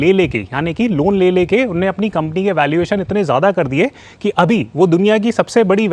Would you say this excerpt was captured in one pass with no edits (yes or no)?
yes